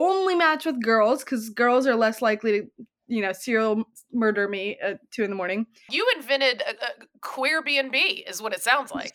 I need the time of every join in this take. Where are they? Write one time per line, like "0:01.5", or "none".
0:05.9